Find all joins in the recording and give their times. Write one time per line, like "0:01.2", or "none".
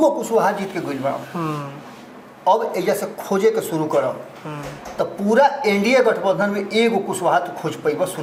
none